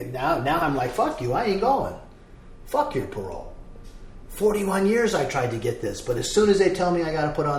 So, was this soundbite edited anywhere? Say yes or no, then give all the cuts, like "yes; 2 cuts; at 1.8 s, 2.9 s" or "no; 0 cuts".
no; 0 cuts